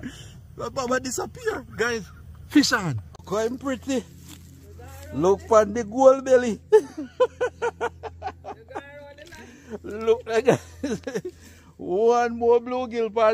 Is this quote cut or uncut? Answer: cut